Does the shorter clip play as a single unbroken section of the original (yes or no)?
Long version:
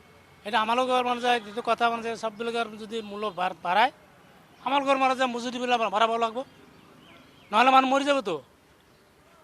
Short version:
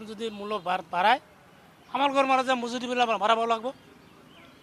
yes